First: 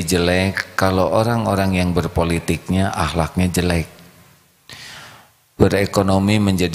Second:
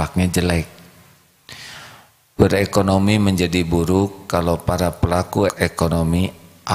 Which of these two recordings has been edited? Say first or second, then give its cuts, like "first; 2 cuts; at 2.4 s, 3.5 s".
second; 1 cut; at 5.5 s